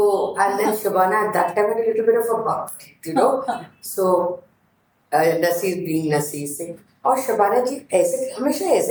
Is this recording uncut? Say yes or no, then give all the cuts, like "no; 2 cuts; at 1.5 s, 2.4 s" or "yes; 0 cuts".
yes; 0 cuts